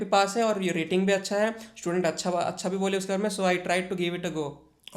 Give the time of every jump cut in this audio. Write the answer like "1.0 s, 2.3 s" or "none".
none